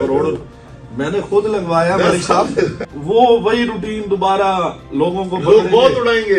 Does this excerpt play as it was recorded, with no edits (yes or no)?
no